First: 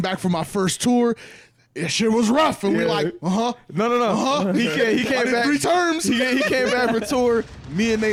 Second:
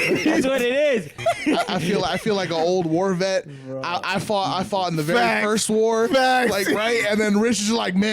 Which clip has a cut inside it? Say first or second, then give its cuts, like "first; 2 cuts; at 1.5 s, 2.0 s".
second; 1 cut; at 1.1 s